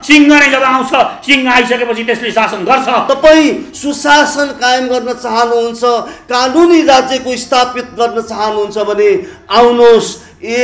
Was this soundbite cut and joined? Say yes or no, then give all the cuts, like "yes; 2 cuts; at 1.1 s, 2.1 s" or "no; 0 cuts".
yes; 1 cut; at 3.0 s